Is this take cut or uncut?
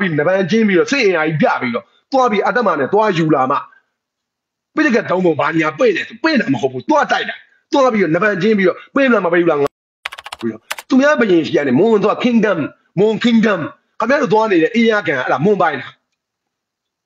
cut